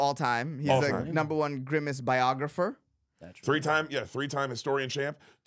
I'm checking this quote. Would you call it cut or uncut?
uncut